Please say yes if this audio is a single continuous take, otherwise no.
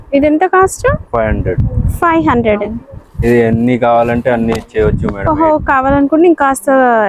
yes